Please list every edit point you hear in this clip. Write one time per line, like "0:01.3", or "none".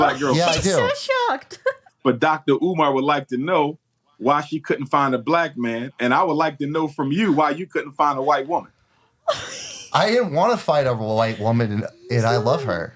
0:01.9